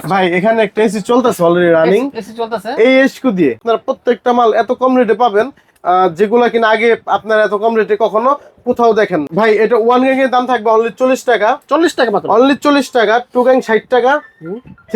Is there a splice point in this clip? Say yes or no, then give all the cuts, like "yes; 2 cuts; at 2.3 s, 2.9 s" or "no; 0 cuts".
yes; 2 cuts; at 3.6 s, 9.3 s